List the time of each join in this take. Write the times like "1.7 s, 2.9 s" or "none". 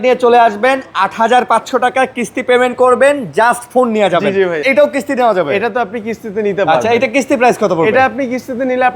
4.6 s